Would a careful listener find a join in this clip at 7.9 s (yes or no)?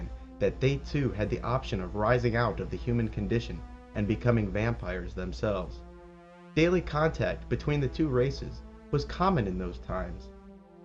no